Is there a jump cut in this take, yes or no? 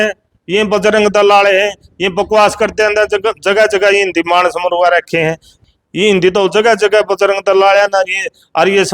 yes